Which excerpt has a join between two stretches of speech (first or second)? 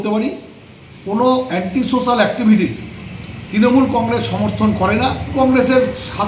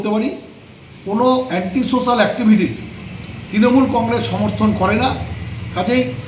first